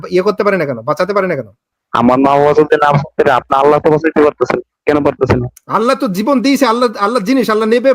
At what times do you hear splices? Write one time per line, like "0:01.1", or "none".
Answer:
0:04.7
0:05.6

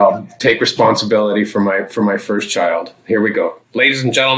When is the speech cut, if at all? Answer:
none

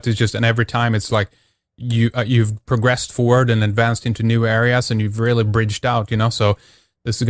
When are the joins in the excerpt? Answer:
none

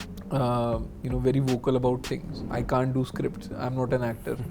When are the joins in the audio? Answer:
0:02.4

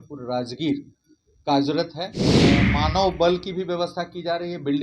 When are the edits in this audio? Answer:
0:02.5

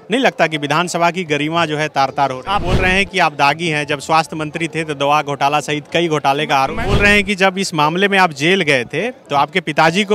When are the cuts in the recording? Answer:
0:02.6
0:06.7

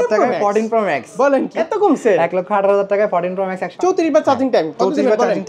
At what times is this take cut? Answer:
0:01.5
0:03.7

